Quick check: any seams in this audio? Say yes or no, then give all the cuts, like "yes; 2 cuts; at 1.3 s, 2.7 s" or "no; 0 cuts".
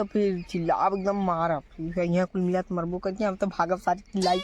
no; 0 cuts